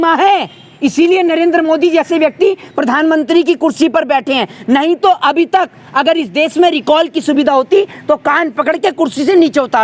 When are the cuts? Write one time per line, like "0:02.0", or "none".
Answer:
none

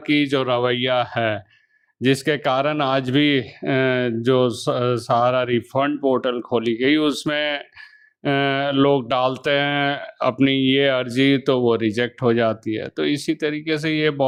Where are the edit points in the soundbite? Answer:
none

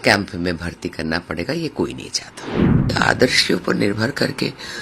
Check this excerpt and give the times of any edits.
0:02.9

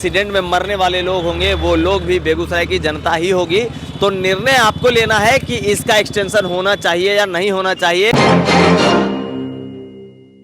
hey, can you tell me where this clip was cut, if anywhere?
0:08.1

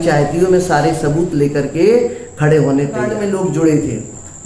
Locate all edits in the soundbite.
0:03.1

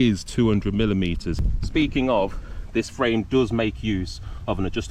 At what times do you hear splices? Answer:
0:01.4

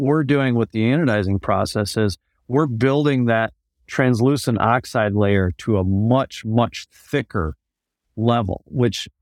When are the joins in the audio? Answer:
none

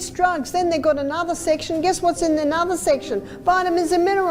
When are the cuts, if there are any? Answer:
none

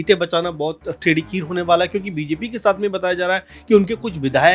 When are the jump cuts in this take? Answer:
none

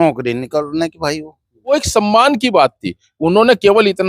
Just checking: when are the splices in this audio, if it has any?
0:01.7

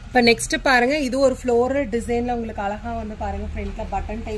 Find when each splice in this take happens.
none

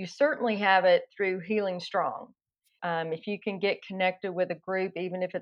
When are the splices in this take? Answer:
0:02.7

